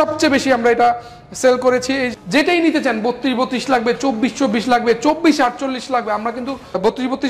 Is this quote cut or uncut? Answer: cut